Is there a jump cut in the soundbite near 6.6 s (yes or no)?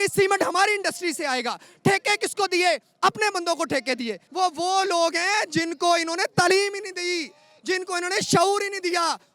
no